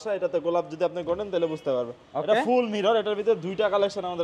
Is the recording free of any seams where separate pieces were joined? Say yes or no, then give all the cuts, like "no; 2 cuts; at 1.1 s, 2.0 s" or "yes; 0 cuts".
yes; 0 cuts